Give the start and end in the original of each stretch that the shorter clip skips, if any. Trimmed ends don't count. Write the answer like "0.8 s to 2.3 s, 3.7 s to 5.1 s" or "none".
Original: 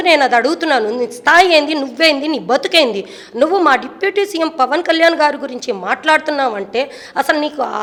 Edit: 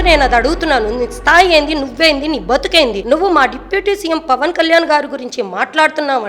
3.0 s to 3.3 s